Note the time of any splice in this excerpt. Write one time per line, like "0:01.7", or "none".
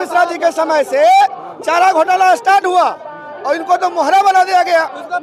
none